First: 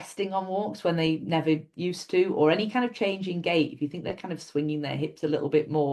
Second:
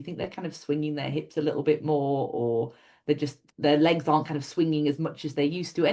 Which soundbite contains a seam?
second; 1 cut; at 3.4 s

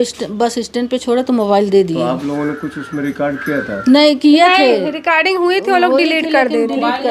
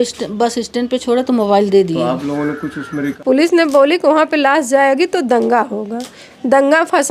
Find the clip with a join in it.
second; 1 cut; at 3.1 s

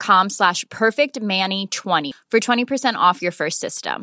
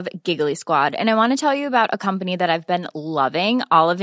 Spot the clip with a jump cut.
first; 1 cut; at 2.0 s

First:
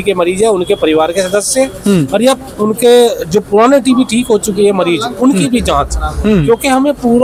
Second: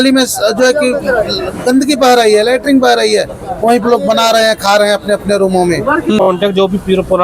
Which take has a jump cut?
second; 1 cut; at 6.2 s

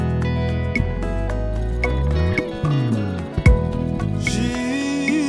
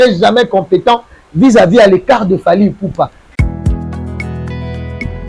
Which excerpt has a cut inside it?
second; 1 cut; at 3.2 s

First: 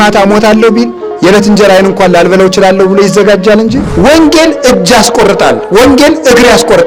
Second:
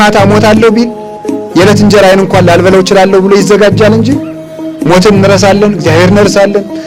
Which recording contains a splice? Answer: first; 2 cuts; at 1.0 s, 4.1 s

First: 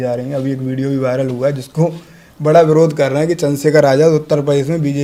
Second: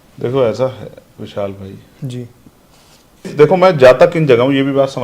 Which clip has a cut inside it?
second; 1 cut; at 3.3 s

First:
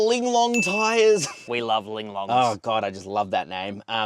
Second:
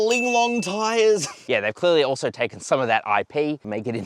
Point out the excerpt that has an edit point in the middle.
second; 1 cut; at 1.4 s

